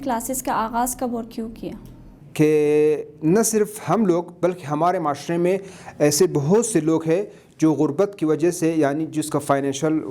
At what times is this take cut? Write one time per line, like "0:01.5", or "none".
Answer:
0:02.0